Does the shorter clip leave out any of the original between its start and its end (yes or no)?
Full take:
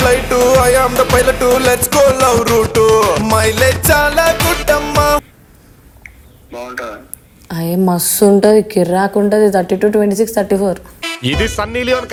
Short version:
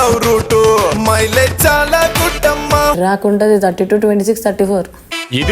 yes